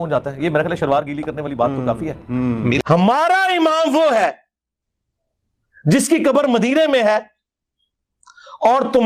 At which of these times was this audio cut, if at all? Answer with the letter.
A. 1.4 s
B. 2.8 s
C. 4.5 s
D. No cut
B